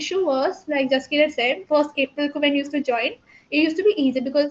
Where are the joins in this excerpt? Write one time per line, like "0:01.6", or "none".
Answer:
none